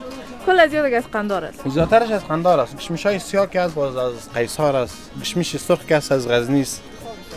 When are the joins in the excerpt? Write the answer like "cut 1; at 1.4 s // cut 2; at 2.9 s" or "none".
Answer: none